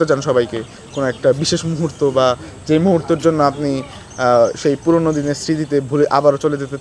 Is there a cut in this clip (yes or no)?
no